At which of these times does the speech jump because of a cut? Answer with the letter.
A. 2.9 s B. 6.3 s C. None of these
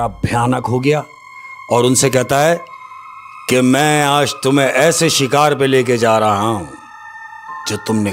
C